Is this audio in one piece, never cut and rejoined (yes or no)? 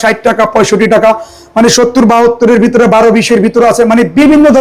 yes